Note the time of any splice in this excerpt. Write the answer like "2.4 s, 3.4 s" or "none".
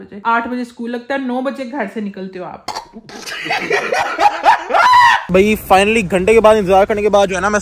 5.2 s